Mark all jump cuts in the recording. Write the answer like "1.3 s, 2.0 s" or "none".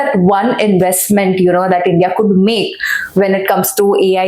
none